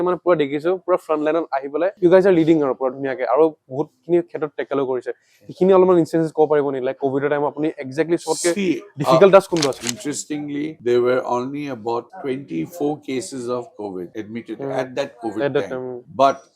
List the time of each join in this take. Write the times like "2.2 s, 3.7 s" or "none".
9.9 s

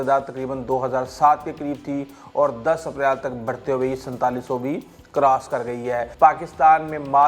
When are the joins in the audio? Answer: 6.1 s

